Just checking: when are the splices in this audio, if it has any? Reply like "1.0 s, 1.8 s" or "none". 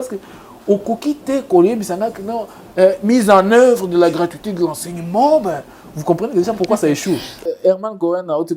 7.4 s